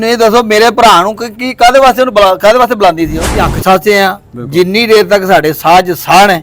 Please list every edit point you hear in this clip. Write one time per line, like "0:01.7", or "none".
0:03.5